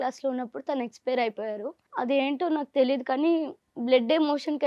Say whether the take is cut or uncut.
cut